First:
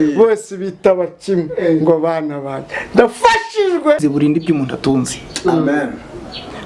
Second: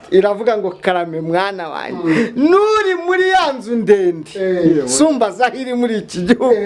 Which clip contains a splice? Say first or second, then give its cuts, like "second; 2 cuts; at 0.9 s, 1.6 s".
first; 1 cut; at 4.0 s